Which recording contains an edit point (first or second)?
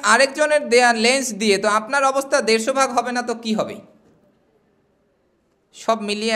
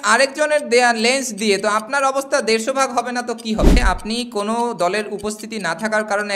second